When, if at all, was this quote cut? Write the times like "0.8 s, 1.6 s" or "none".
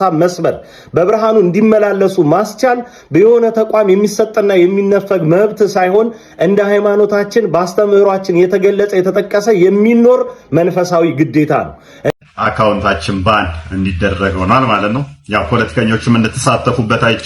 12.1 s